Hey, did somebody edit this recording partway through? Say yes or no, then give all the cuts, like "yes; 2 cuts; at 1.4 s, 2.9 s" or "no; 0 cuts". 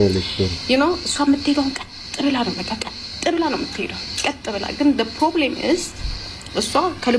no; 0 cuts